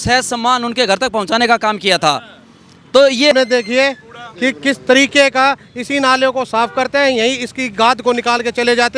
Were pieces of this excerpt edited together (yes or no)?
yes